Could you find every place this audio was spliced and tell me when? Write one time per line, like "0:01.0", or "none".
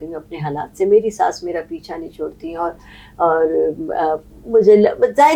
none